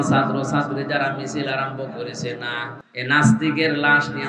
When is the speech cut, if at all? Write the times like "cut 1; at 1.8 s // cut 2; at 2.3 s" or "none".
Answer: cut 1; at 2.8 s